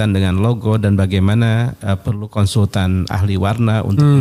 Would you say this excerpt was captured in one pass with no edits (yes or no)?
yes